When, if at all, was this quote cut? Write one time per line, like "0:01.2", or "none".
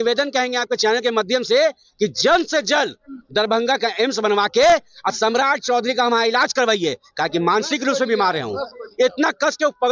none